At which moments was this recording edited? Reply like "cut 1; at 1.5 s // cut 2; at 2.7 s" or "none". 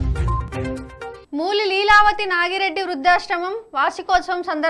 cut 1; at 1.2 s

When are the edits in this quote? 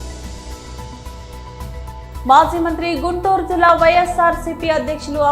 cut 1; at 1.0 s // cut 2; at 2.2 s

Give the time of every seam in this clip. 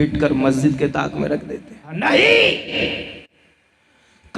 cut 1; at 2.0 s

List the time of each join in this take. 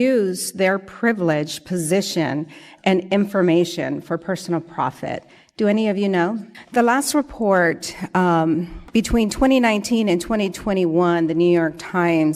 none

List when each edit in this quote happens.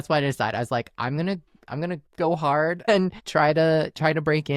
none

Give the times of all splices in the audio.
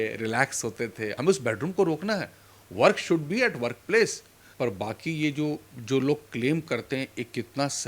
cut 1; at 1.1 s // cut 2; at 4.4 s

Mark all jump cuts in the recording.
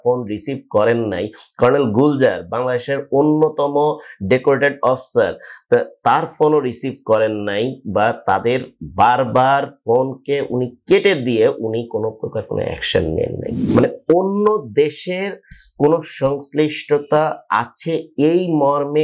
cut 1; at 13.7 s

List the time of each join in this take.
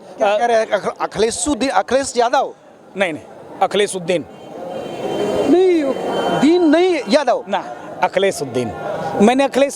none

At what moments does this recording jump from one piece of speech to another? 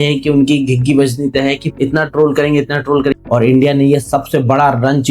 cut 1; at 3.1 s

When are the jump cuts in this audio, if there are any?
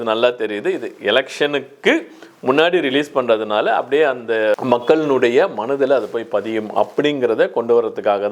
cut 1; at 4.6 s

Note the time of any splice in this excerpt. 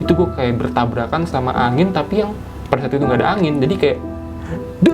cut 1; at 1.3 s // cut 2; at 2.5 s

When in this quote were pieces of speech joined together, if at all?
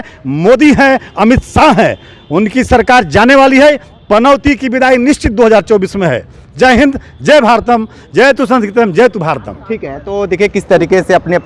none

